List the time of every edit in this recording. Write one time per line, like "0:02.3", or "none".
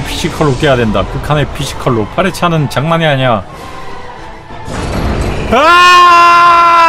none